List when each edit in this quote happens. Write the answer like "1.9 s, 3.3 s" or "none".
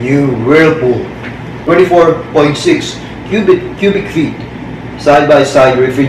1.6 s

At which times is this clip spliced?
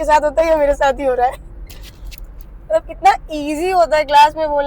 none

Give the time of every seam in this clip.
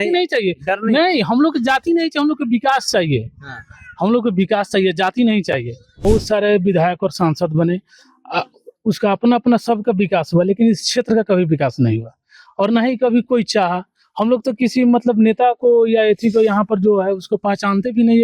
6.0 s

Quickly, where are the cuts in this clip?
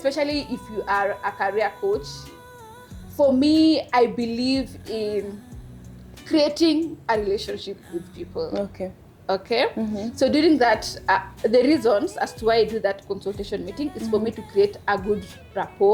none

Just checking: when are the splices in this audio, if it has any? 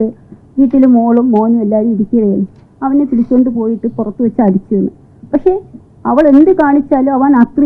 none

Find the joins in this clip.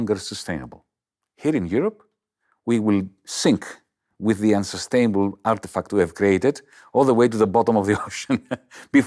none

